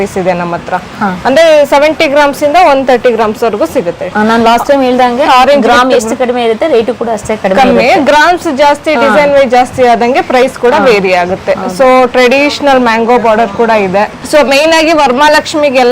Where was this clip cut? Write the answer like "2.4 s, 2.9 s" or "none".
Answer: none